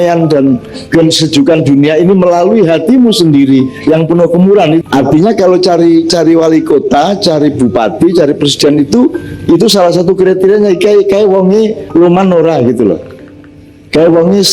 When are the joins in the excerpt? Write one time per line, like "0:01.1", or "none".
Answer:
0:04.8